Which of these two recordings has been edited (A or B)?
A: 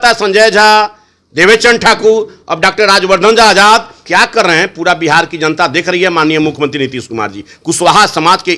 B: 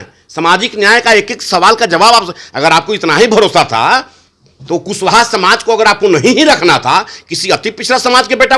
A